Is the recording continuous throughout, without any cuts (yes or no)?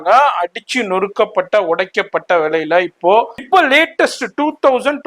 no